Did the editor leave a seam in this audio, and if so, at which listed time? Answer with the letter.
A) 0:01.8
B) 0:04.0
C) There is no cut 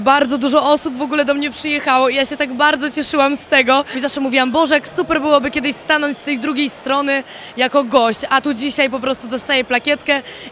B